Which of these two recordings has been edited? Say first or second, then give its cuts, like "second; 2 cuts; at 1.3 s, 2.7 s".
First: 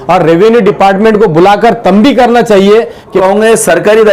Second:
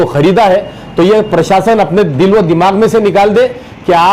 first; 1 cut; at 3.2 s